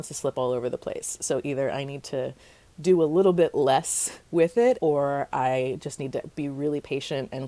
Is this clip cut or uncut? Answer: cut